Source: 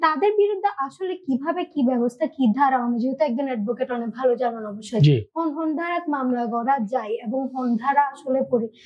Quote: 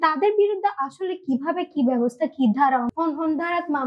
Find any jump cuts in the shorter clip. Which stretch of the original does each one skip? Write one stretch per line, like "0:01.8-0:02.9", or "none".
0:02.9-0:05.3

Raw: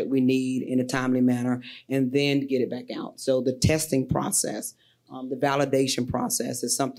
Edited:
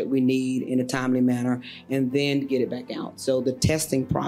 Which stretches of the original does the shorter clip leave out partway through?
none

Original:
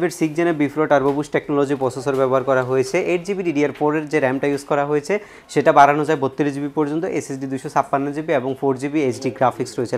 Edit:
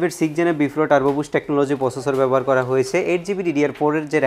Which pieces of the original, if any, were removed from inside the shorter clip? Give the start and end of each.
none

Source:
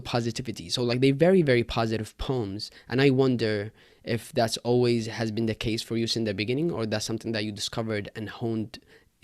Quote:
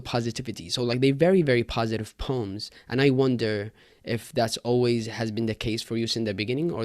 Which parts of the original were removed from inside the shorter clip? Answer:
none

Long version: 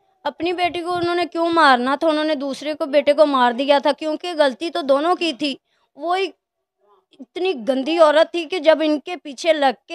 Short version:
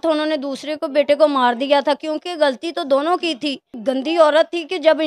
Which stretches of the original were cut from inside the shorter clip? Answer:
0:05.8-0:07.6

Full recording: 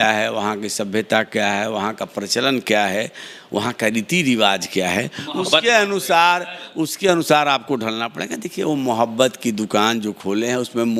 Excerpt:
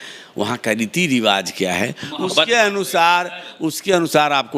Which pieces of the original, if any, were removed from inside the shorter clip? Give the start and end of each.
none

